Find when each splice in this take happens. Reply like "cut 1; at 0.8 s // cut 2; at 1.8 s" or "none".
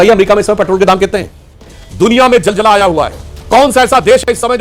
cut 1; at 1.8 s